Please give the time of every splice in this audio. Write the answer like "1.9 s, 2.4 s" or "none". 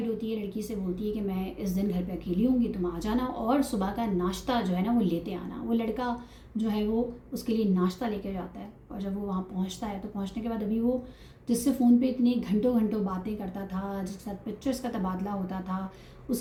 none